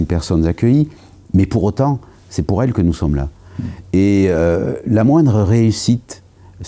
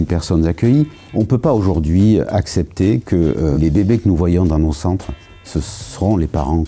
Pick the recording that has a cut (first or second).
second